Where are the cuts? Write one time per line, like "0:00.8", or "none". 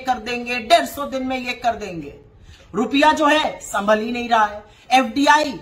none